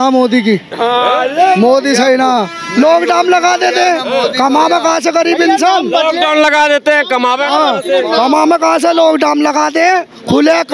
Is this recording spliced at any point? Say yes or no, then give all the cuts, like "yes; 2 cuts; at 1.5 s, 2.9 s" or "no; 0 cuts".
no; 0 cuts